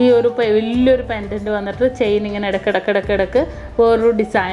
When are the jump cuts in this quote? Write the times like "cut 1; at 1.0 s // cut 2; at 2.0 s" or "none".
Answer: none